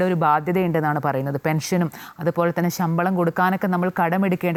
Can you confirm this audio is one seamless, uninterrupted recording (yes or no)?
yes